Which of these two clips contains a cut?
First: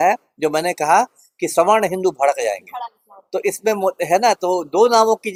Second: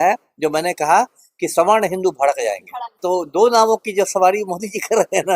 second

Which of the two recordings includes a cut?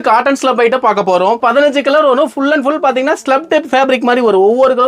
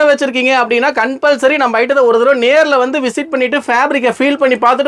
first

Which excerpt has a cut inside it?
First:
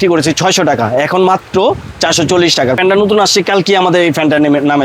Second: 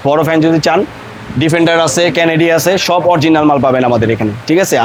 first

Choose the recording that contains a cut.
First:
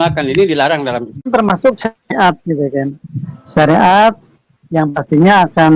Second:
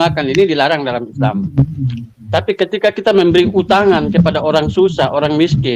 first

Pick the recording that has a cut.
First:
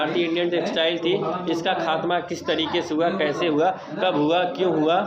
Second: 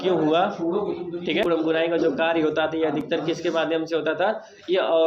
second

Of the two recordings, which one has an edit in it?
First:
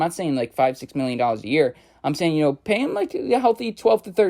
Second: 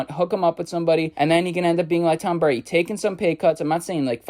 second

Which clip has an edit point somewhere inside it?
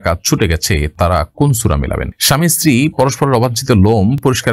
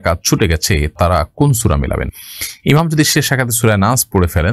first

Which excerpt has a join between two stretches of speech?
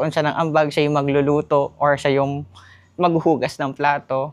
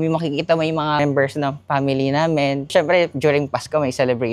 second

